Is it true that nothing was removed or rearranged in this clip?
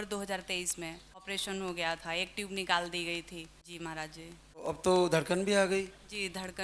no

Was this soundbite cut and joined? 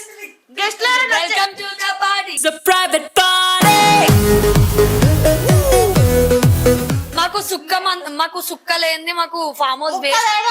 yes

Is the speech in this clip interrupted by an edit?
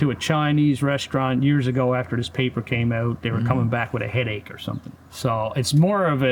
yes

